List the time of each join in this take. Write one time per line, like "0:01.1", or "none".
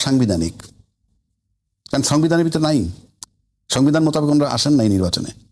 none